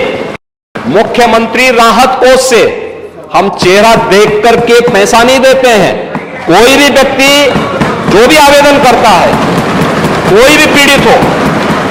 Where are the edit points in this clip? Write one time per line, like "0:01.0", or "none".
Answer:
none